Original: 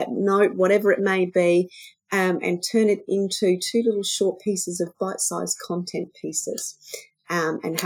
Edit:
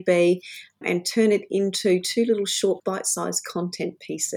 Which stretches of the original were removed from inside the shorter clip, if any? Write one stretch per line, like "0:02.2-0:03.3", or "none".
0:02.1-0:02.4
0:04.4-0:04.9